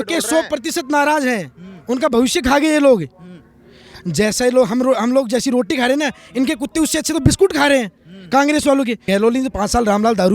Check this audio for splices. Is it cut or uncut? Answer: cut